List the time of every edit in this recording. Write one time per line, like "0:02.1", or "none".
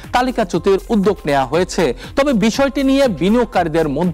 none

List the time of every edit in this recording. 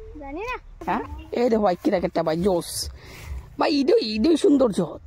0:01.1

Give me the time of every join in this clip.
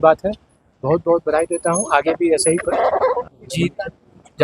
0:03.2

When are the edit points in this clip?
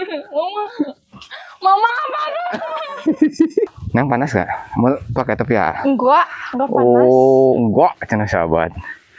0:03.7

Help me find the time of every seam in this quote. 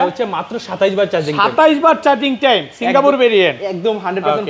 none

